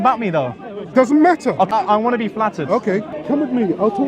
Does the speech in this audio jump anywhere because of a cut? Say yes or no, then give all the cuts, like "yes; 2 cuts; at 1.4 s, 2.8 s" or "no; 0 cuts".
yes; 2 cuts; at 1.7 s, 3.1 s